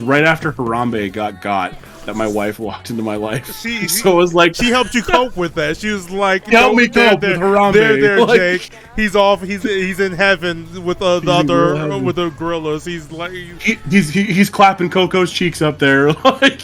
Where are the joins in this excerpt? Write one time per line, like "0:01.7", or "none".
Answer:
none